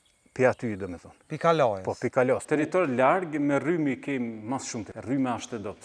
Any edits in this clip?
yes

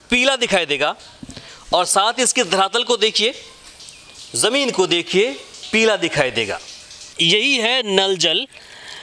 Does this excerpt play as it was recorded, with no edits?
no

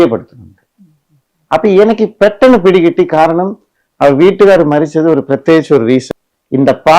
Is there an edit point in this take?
yes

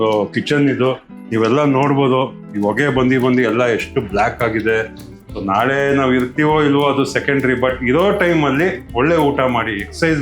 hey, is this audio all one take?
no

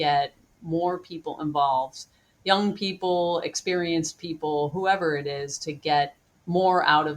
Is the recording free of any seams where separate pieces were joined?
no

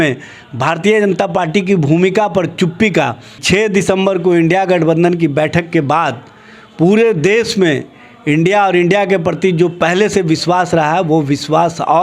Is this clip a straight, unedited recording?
no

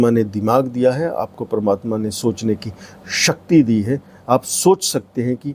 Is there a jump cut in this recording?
no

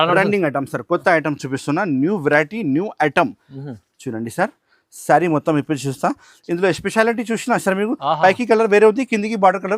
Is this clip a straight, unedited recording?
yes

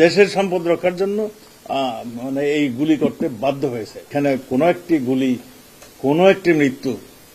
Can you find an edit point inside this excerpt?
yes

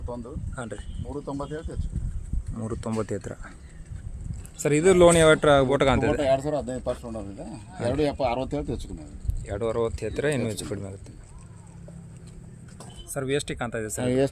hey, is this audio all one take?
no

